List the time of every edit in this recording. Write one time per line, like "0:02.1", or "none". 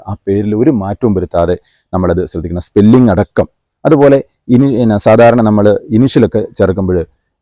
none